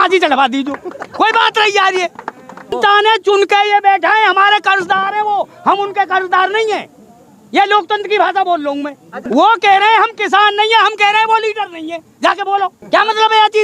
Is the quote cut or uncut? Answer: cut